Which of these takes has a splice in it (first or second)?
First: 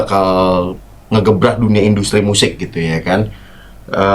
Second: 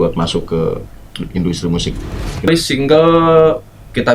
second